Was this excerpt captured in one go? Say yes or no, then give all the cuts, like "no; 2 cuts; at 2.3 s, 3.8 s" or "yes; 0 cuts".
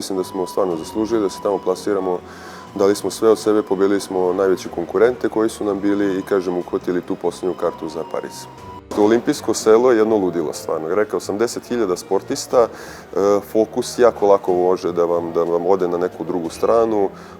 no; 1 cut; at 8.9 s